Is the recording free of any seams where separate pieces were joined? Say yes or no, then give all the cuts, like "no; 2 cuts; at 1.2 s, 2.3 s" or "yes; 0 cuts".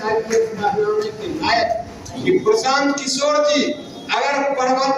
no; 1 cut; at 2.1 s